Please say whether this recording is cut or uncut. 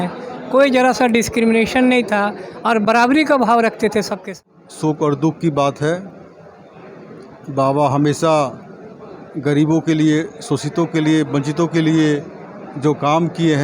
cut